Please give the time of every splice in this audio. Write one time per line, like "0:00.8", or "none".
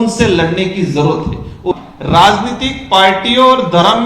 0:01.7